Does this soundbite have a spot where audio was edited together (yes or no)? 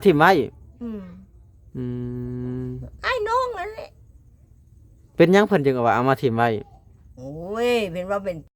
no